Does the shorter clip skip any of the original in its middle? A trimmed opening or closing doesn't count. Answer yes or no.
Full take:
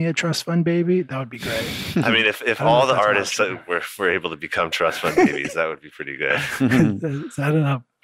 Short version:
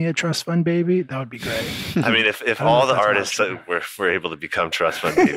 no